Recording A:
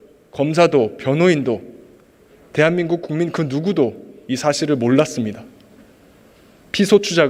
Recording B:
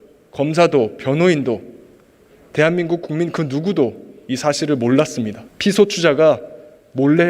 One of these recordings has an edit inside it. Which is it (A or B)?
B